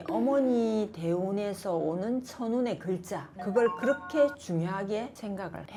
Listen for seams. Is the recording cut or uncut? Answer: uncut